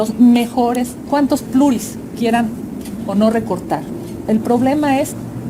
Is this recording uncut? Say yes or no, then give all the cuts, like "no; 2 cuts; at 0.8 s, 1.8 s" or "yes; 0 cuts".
no; 1 cut; at 1.0 s